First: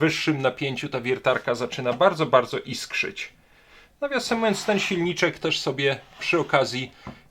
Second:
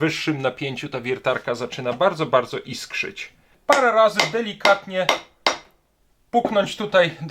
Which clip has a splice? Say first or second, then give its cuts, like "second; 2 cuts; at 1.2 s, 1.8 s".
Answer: second; 1 cut; at 3.5 s